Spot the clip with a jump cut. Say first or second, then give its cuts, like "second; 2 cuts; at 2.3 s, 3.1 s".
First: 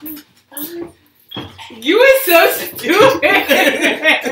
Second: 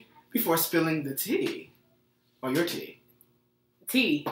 second; 1 cut; at 3.1 s